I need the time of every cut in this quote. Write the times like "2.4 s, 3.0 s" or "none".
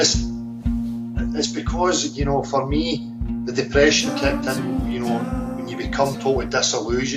none